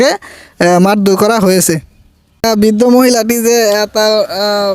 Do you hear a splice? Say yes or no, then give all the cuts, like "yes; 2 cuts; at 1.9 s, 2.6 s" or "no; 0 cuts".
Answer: yes; 1 cut; at 2.4 s